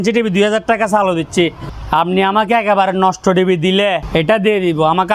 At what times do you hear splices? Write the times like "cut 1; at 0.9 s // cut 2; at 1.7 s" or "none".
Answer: cut 1; at 1.7 s // cut 2; at 4.0 s